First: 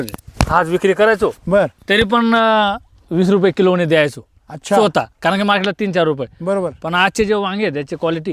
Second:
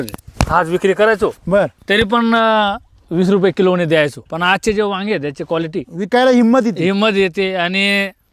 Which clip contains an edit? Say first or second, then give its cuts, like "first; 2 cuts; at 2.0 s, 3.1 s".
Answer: second; 1 cut; at 4.3 s